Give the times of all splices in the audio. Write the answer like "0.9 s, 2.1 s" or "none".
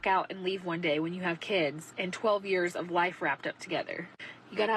2.7 s